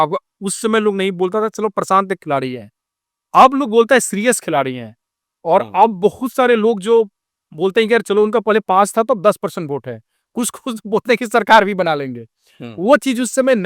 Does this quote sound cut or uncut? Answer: uncut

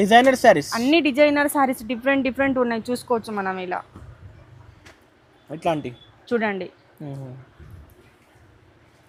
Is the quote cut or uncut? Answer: uncut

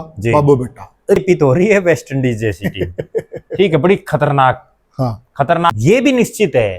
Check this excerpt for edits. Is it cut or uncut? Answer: cut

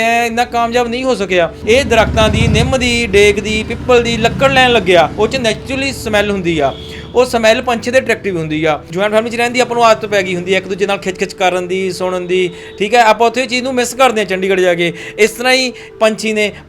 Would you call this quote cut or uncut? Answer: cut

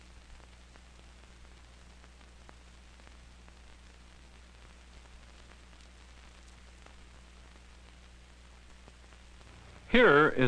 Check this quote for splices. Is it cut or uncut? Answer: uncut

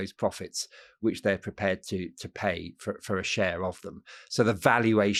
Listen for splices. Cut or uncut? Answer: uncut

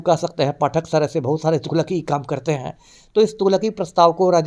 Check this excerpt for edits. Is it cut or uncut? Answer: uncut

